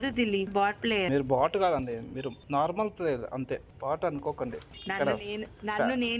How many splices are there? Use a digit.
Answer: 1